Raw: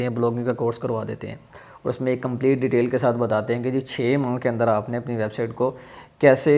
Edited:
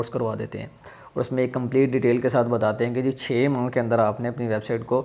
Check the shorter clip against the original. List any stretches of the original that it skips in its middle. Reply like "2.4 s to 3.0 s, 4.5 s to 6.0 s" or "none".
none